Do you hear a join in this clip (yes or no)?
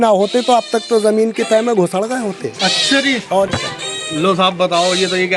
no